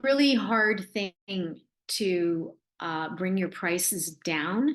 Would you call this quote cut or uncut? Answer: uncut